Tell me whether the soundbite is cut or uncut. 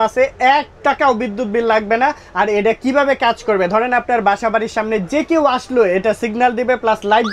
uncut